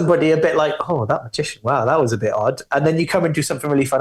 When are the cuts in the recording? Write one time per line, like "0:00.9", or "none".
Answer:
none